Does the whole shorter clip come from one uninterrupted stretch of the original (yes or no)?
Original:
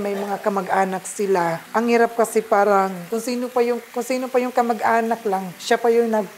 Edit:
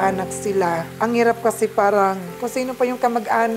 no